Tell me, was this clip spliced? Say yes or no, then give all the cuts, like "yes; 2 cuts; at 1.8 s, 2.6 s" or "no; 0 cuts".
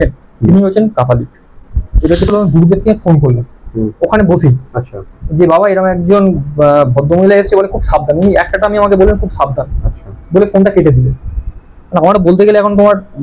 yes; 1 cut; at 2.3 s